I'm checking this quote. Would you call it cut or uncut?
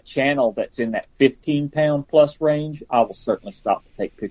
uncut